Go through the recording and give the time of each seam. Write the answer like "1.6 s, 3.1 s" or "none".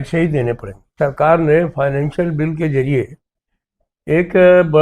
0.9 s